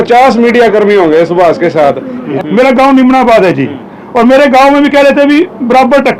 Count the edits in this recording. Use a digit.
1